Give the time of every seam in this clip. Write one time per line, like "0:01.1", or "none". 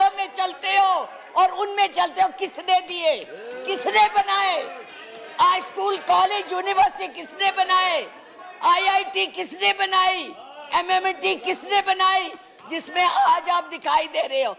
none